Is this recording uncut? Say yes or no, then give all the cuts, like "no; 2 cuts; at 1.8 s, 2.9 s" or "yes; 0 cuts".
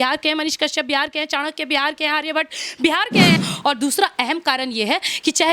no; 1 cut; at 3.4 s